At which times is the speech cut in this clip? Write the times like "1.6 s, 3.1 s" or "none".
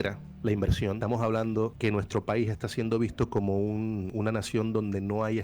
1.0 s, 1.7 s, 4.1 s